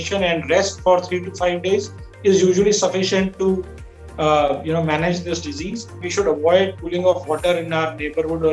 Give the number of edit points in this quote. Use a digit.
1